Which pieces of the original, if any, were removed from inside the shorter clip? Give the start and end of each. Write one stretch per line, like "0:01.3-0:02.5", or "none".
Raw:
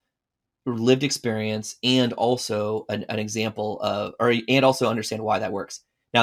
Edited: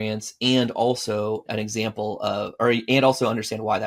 0:02.9-0:03.0